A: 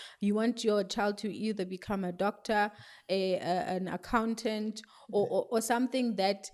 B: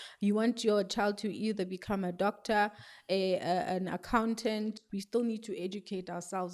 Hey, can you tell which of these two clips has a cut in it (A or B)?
B